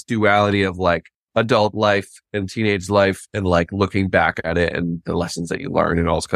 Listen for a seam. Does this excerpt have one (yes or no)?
yes